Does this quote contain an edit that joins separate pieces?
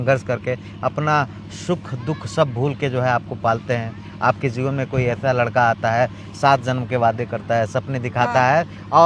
no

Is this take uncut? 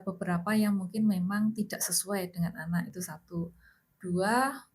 yes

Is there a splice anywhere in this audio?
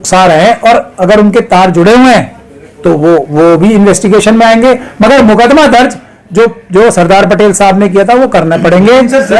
no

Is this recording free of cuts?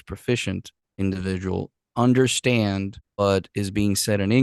no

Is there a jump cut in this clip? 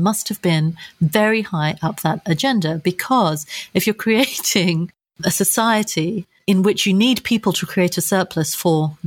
no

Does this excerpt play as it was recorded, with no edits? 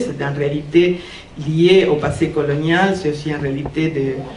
no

